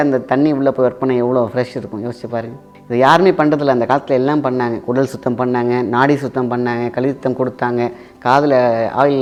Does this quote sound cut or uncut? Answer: uncut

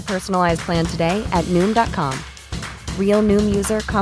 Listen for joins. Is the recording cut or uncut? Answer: uncut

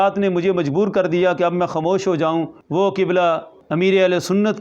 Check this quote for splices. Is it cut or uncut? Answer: cut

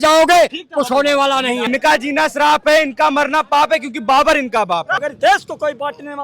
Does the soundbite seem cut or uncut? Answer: cut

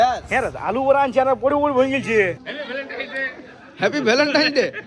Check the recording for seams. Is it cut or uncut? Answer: cut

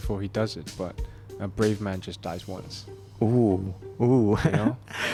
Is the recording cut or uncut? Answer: uncut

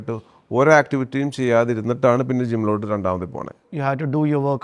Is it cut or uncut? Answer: cut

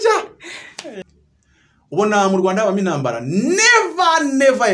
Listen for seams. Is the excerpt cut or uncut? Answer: cut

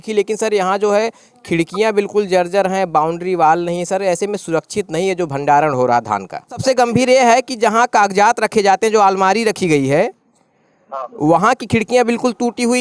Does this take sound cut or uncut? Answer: cut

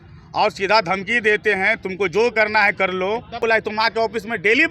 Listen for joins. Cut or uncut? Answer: cut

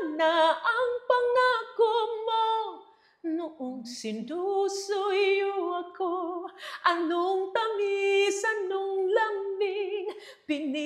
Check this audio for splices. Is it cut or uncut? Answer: uncut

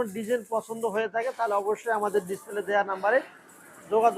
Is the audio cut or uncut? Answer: uncut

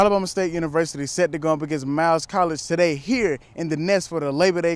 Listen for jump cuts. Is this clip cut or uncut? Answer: uncut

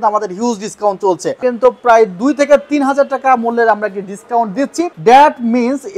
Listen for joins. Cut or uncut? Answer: cut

